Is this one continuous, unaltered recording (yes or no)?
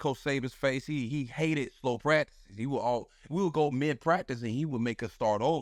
yes